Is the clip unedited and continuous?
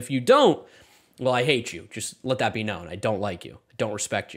yes; 0 cuts

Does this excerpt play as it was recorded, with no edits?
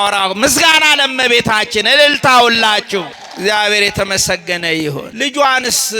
no; 2 cuts; at 3.2 s, 5.1 s

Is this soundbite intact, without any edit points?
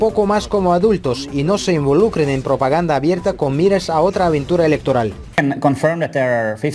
no; 1 cut; at 5.3 s

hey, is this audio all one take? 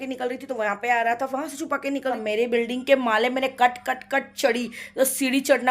no; 1 cut; at 2.2 s

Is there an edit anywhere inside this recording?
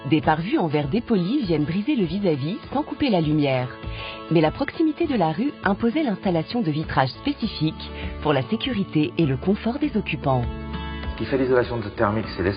yes; 1 cut; at 5.1 s

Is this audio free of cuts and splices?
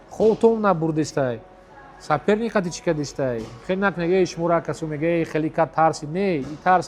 yes; 0 cuts

